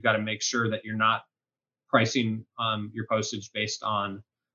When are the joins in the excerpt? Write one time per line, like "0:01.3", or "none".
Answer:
none